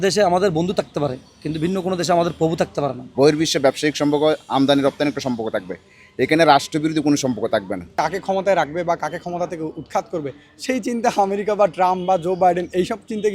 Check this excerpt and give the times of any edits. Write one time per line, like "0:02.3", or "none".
0:03.0
0:07.9